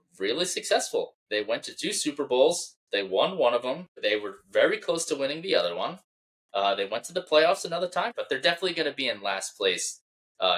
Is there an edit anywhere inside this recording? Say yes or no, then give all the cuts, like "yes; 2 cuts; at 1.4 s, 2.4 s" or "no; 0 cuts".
yes; 3 cuts; at 1.2 s, 3.9 s, 8.1 s